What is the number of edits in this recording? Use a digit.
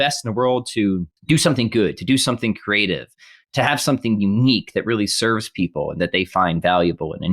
1